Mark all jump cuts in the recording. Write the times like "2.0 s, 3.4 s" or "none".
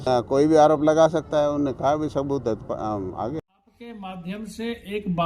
3.7 s